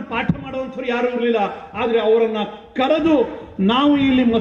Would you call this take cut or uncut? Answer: uncut